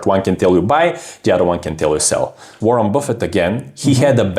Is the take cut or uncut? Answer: cut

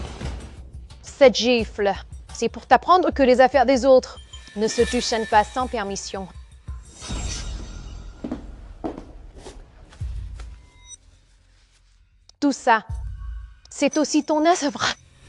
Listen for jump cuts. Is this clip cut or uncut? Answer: uncut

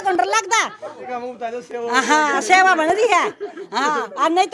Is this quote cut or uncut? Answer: cut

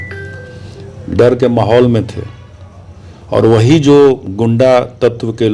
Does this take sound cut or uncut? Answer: uncut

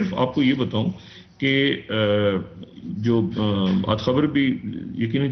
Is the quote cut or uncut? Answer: uncut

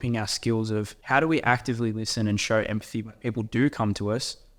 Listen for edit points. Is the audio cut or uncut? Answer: cut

